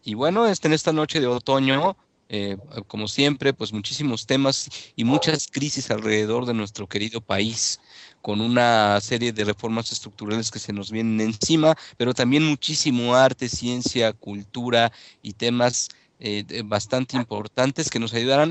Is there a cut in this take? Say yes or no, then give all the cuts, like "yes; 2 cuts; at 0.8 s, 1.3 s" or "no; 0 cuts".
no; 0 cuts